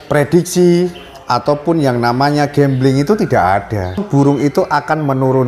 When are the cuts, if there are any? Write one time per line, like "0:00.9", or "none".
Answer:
0:04.0